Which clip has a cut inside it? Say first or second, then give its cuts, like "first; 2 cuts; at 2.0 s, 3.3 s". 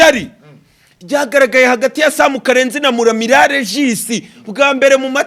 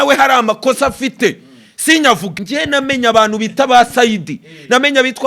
second; 1 cut; at 2.3 s